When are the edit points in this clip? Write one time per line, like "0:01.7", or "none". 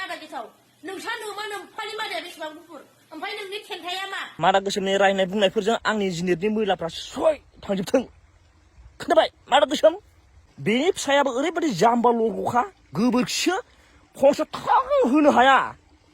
0:04.3